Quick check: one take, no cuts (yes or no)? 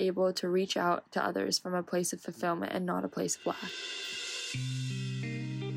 no